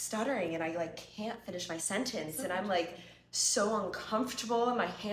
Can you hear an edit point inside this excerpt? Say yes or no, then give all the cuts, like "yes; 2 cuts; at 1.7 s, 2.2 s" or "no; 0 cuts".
no; 0 cuts